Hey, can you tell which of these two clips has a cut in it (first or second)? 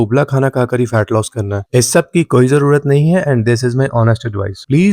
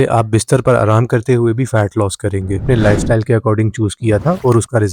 second